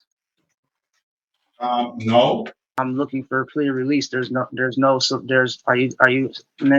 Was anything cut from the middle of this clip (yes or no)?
yes